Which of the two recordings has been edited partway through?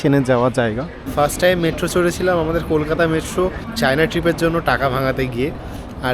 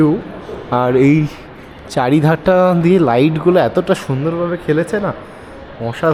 first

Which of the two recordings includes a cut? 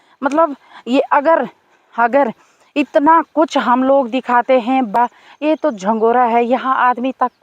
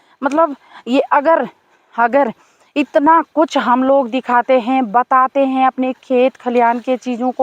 first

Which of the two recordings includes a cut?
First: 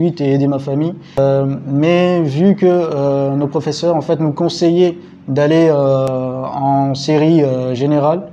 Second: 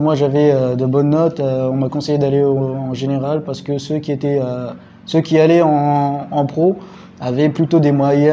first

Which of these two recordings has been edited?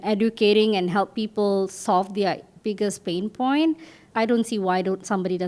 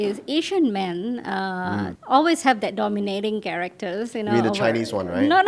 first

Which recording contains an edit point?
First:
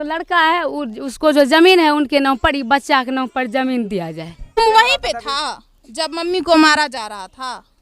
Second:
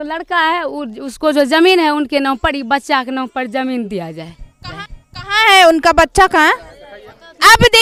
first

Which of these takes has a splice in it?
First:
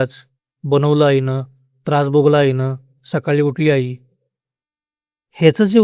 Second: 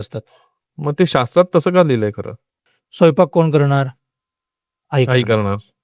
second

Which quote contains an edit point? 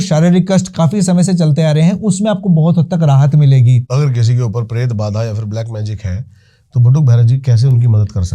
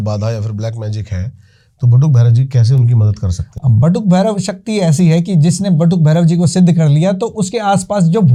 first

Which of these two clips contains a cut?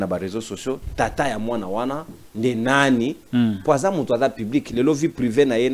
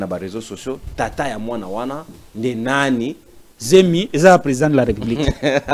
second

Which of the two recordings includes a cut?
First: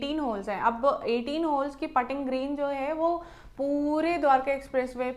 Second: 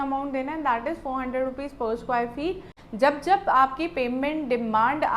second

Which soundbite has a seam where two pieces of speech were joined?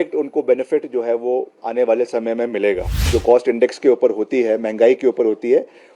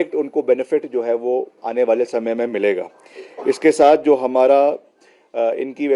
first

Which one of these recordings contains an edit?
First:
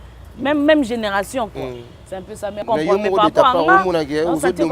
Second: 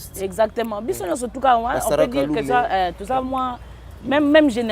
first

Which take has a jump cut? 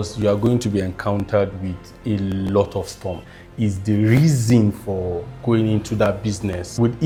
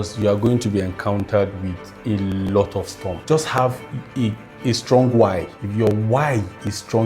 second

